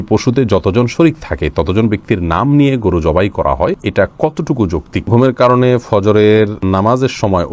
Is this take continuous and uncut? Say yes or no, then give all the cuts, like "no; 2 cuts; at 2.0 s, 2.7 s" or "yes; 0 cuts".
no; 3 cuts; at 3.8 s, 5.1 s, 6.6 s